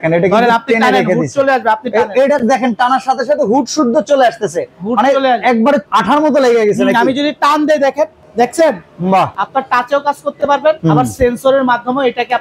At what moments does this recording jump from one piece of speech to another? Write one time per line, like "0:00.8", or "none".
0:05.8
0:08.2
0:09.4
0:10.8